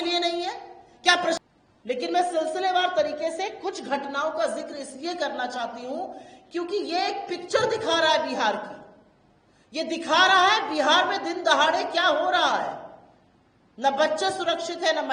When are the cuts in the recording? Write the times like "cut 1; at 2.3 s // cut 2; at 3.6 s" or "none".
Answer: cut 1; at 1.4 s